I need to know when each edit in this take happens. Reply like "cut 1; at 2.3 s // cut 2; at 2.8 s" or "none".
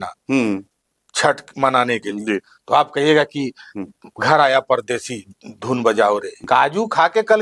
cut 1; at 6.4 s